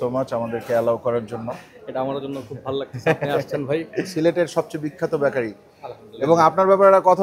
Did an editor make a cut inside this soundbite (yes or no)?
no